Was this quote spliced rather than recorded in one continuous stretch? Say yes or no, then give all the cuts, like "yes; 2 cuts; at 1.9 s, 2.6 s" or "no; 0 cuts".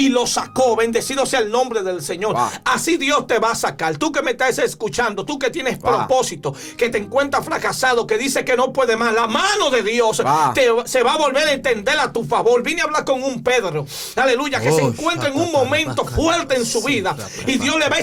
no; 0 cuts